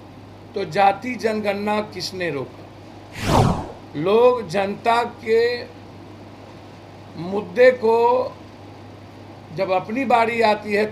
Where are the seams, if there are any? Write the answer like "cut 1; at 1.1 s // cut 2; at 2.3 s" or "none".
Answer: cut 1; at 3.4 s